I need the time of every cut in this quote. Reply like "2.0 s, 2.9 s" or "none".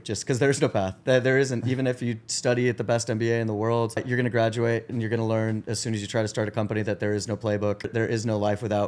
4.0 s, 7.9 s

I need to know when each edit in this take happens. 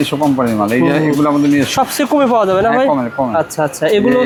none

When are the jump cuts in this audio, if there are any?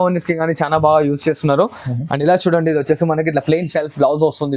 none

